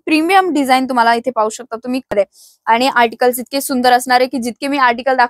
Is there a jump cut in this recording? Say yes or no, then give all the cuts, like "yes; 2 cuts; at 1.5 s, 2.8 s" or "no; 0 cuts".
yes; 1 cut; at 2.1 s